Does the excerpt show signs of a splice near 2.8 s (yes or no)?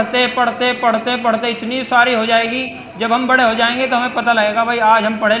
no